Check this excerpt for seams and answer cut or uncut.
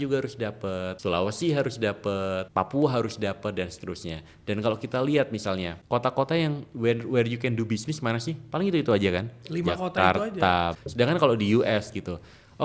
cut